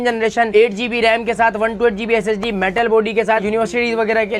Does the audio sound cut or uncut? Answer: uncut